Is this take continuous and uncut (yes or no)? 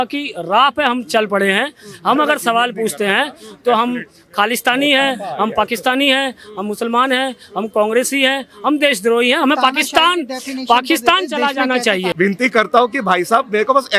no